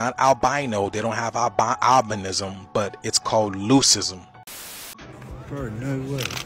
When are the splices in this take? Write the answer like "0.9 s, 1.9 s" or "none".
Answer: 4.5 s

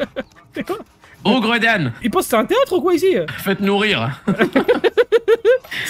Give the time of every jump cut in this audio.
2.0 s, 3.3 s

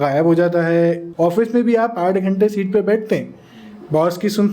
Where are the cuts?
1.1 s

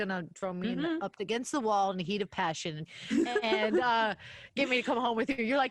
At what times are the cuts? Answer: 2.9 s

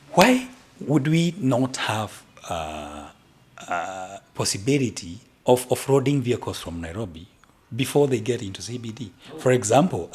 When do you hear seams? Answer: none

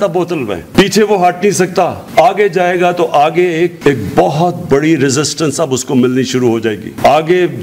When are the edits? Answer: none

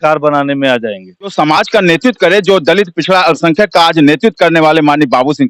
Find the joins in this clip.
1.3 s

